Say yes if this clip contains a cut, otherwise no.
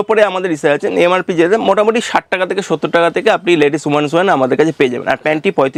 no